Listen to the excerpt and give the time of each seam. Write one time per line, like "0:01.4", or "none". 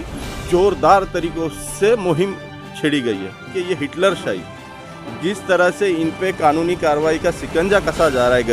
0:03.5